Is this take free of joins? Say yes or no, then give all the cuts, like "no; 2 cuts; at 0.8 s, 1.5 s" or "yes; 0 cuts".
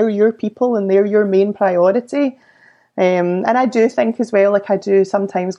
yes; 0 cuts